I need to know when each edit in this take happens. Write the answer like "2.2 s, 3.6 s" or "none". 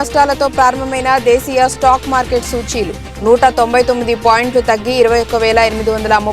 none